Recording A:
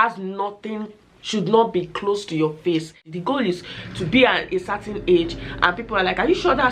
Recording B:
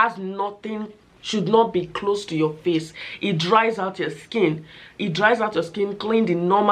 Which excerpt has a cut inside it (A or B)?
A